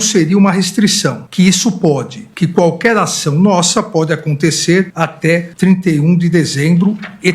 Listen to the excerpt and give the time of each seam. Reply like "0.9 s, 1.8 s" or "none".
1.2 s, 5.2 s